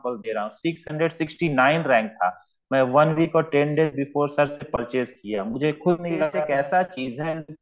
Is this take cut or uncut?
cut